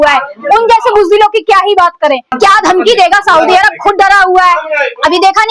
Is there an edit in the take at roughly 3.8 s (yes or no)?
no